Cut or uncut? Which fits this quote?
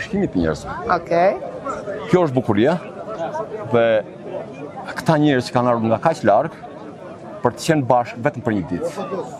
uncut